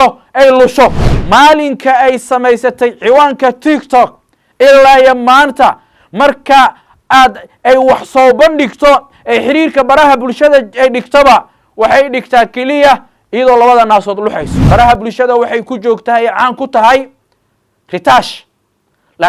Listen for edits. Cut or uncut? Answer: cut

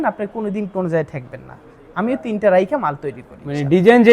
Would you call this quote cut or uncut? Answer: uncut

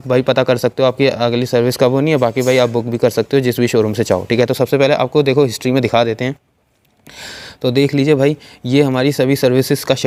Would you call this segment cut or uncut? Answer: uncut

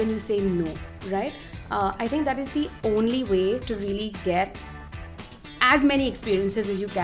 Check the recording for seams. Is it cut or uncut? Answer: uncut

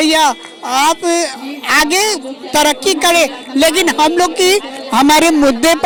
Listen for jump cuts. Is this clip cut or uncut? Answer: uncut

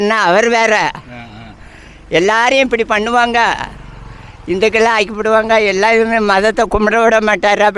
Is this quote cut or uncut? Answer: uncut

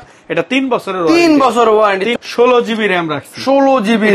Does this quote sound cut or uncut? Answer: cut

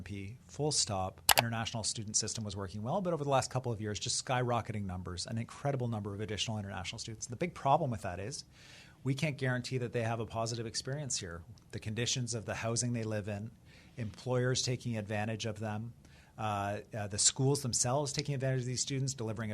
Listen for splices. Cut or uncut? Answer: cut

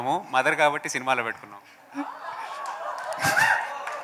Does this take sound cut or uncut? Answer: uncut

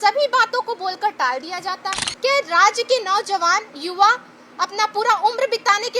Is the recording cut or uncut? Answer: cut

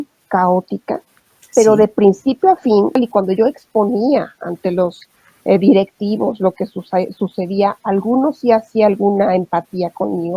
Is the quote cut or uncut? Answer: cut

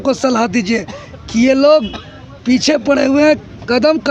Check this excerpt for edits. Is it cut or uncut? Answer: uncut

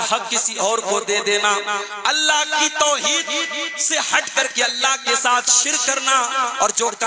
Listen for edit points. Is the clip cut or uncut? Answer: uncut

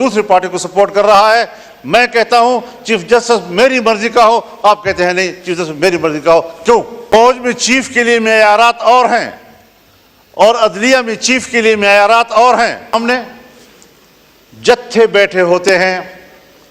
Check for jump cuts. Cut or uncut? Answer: cut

